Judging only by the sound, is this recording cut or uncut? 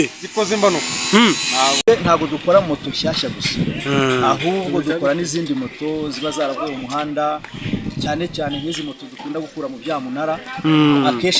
cut